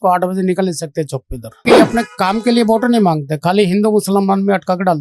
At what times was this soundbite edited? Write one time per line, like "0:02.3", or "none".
0:01.7